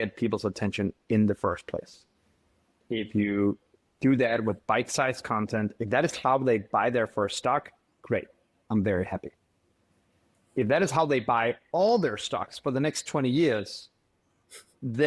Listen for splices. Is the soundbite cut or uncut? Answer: uncut